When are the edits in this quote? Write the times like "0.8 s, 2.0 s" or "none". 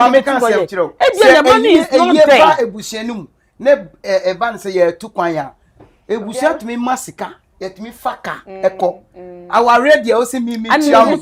none